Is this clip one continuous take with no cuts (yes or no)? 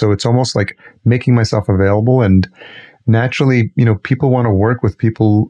yes